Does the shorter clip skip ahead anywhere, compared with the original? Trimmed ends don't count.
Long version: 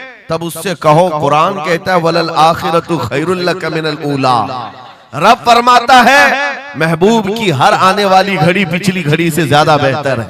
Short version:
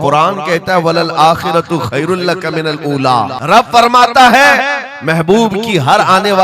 yes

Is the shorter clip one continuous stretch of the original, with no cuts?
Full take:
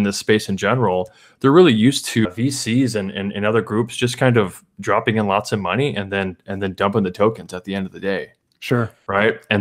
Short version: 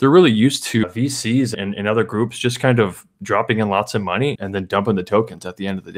no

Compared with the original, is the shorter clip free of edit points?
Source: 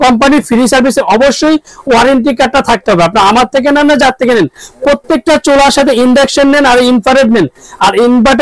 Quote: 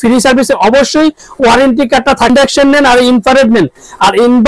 no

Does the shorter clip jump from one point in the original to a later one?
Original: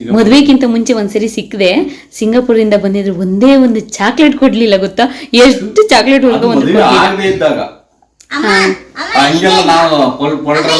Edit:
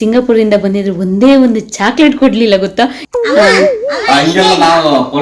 yes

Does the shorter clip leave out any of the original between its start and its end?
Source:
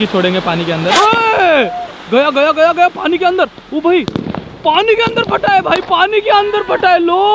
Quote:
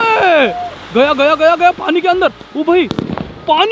no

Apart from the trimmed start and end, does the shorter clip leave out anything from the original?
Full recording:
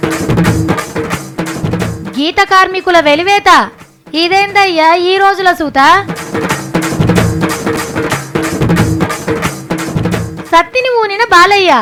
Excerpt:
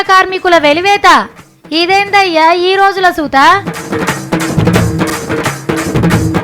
yes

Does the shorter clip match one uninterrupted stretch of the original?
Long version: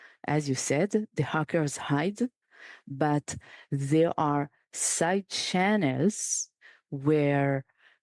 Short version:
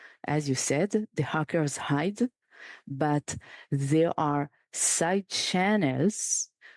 yes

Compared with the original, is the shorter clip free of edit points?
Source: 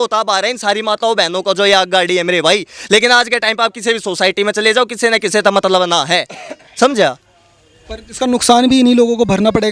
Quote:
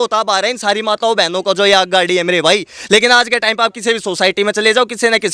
yes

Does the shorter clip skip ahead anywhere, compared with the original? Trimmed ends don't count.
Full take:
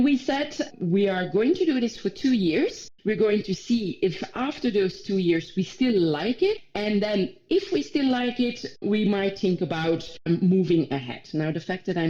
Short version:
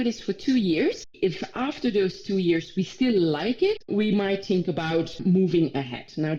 yes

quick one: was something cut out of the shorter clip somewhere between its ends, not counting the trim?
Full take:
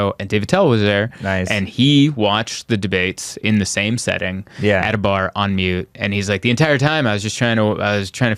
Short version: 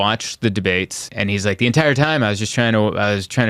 yes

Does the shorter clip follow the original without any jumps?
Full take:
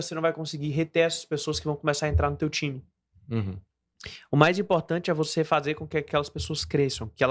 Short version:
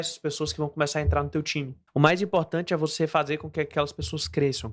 no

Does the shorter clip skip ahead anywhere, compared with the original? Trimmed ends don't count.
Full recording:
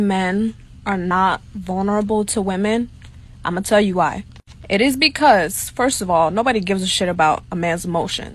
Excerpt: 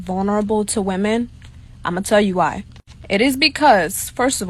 no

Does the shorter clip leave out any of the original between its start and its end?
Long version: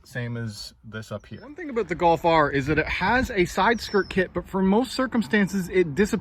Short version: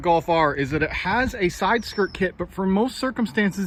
no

